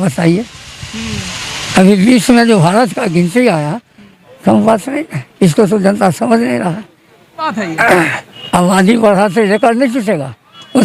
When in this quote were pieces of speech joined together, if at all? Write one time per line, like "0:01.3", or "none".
0:07.5